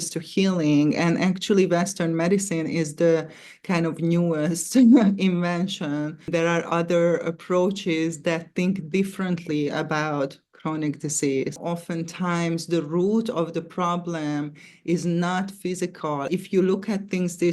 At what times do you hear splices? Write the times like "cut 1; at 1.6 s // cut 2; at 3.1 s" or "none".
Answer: cut 1; at 6.2 s // cut 2; at 11.6 s // cut 3; at 16.3 s